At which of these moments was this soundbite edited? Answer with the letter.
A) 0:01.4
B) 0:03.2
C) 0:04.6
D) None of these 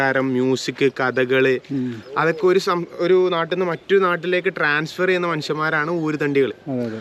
D